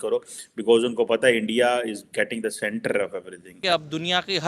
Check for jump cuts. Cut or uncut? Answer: cut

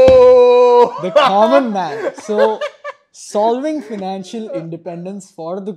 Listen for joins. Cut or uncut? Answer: uncut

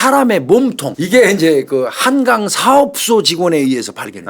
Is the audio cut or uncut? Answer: cut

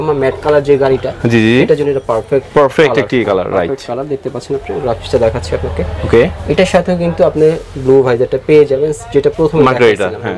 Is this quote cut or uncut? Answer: uncut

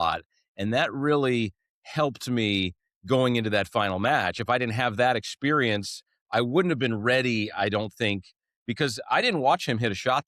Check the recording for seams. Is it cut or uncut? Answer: uncut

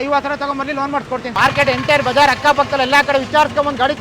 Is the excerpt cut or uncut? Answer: cut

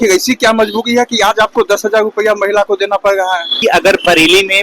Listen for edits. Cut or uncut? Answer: cut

